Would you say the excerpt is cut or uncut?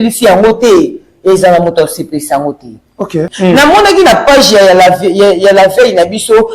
cut